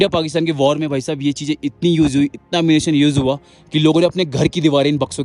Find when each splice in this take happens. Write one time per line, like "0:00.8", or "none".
none